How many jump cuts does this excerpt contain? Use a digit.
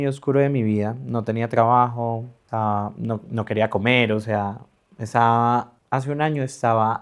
0